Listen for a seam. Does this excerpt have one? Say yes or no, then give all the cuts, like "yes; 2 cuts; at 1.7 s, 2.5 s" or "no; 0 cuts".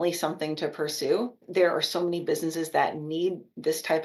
yes; 1 cut; at 1.4 s